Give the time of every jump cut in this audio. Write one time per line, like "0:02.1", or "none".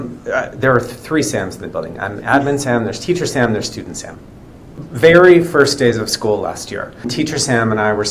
0:04.8
0:07.1